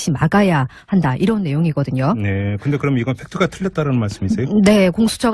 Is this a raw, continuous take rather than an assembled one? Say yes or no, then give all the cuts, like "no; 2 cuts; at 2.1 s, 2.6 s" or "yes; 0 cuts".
yes; 0 cuts